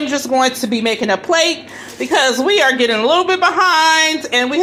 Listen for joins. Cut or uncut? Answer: uncut